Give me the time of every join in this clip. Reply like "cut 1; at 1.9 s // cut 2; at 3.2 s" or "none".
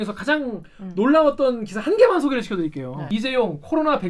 cut 1; at 3.0 s